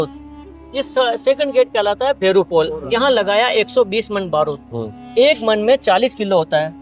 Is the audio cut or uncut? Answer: uncut